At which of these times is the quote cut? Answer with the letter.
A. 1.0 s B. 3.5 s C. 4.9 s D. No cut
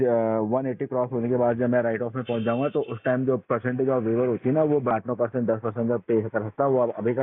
C